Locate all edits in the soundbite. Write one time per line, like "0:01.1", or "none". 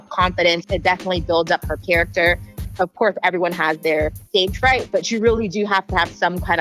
0:02.6
0:04.2